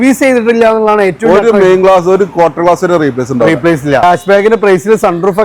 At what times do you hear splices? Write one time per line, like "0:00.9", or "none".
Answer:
0:04.0